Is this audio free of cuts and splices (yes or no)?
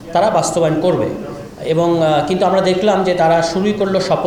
yes